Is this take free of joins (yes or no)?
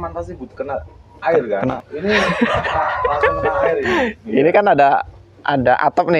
no